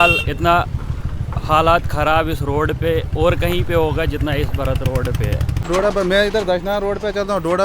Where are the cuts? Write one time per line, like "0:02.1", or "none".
0:05.7